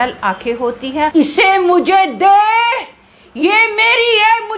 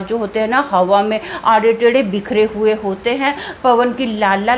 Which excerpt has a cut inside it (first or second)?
first